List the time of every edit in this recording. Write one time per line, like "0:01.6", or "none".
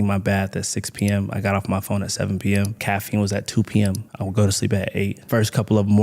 0:02.8
0:04.2
0:05.2